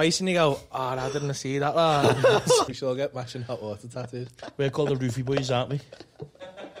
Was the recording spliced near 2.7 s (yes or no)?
yes